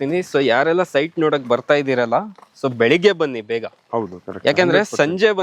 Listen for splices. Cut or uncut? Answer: uncut